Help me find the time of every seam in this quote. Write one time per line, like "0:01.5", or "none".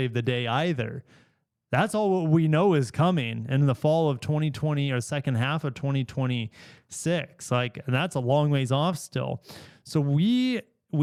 none